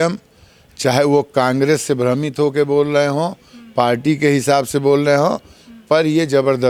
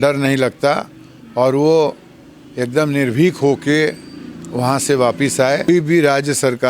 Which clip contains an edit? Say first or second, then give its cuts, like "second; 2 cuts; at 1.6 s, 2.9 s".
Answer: second; 1 cut; at 5.7 s